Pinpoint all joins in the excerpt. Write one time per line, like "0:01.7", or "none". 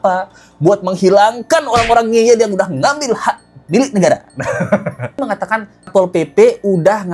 0:05.2